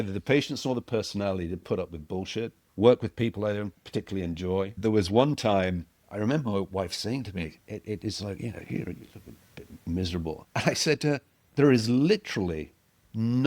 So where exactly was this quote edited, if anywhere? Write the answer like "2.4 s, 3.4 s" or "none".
2.6 s, 3.8 s, 4.7 s, 5.9 s, 10.4 s, 11.4 s